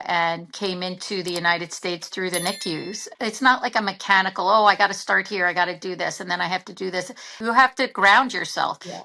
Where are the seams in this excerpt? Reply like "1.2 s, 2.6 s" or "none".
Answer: 3.0 s, 7.4 s